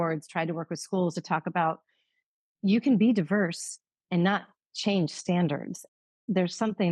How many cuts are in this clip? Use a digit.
1